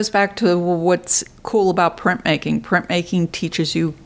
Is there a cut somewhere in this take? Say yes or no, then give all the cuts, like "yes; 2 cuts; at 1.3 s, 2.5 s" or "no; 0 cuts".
no; 0 cuts